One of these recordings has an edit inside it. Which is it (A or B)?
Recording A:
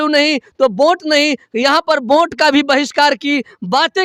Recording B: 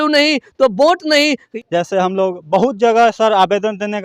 B